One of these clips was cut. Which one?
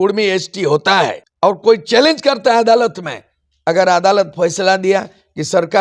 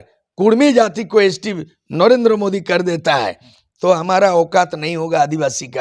first; 1 cut; at 1.2 s

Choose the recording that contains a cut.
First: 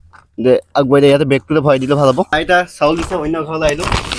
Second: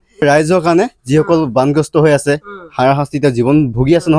first; 1 cut; at 2.3 s

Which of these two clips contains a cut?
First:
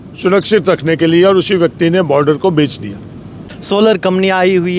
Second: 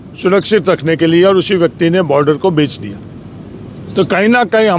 first; 1 cut; at 3.5 s

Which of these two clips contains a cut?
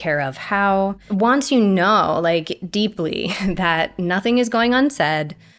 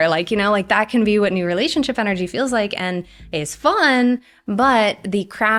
first; 1 cut; at 1.0 s

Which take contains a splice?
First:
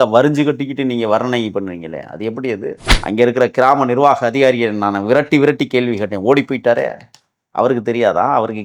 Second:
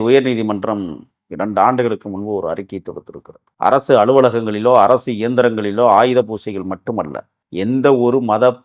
first; 1 cut; at 2.9 s

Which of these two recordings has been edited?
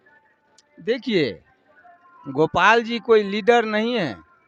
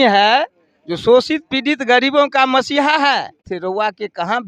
second; 1 cut; at 3.4 s

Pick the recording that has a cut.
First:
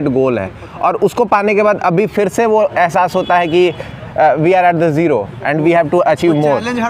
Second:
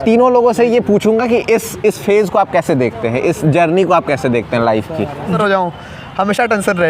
second; 1 cut; at 5.4 s

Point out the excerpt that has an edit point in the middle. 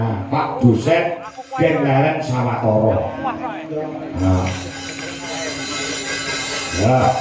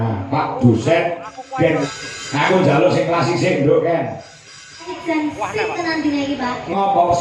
second; 2 cuts; at 1.8 s, 4.9 s

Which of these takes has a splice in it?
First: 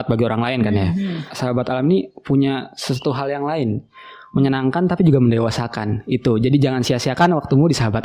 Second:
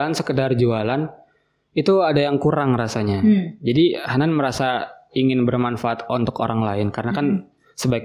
first; 1 cut; at 1.3 s

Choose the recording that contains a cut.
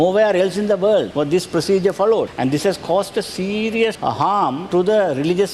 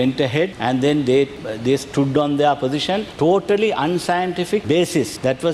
first; 3 cuts; at 1.1 s, 2.3 s, 4.3 s

